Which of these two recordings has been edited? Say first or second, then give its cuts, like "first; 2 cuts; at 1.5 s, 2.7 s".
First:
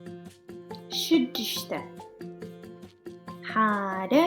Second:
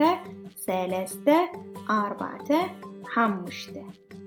first; 1 cut; at 1.1 s